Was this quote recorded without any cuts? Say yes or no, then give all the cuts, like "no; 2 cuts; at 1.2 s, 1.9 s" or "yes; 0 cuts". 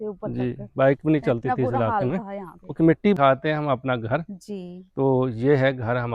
no; 1 cut; at 3.2 s